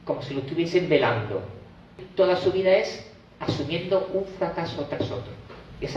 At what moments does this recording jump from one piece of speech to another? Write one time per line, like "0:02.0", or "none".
0:02.0

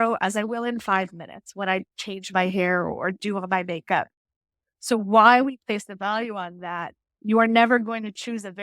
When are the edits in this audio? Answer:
0:07.1

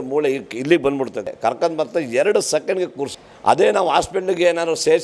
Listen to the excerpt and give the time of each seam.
0:01.3
0:03.2

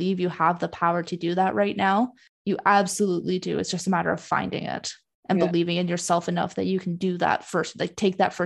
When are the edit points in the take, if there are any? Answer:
0:02.3

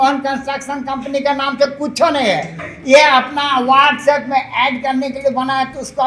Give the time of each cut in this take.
none

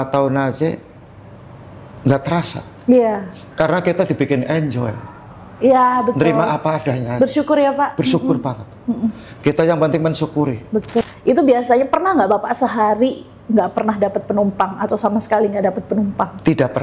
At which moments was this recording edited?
0:11.1

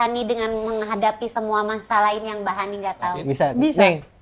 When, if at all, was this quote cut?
0:03.2

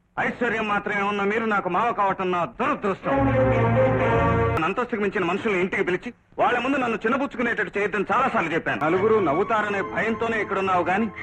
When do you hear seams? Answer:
0:04.6
0:08.8

